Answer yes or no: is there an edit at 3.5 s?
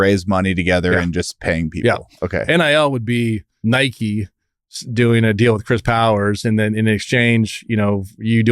yes